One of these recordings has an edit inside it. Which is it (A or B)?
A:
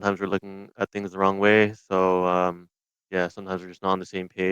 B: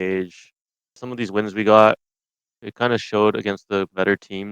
B